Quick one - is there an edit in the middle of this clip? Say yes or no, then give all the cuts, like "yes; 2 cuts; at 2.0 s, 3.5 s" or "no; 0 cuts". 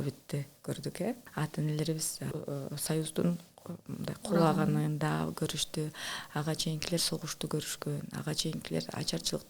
yes; 2 cuts; at 1.3 s, 2.3 s